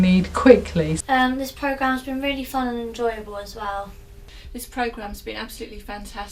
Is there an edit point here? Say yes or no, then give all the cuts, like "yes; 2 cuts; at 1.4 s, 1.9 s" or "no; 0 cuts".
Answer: yes; 2 cuts; at 0.9 s, 4.0 s